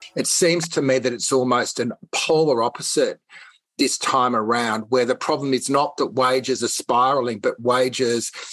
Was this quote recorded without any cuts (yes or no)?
yes